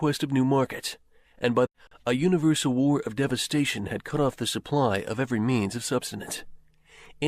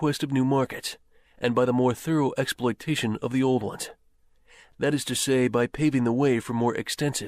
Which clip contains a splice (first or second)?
second